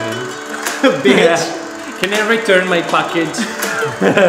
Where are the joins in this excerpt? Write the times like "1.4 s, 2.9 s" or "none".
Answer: none